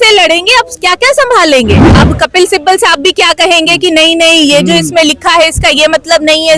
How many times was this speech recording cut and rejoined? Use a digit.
1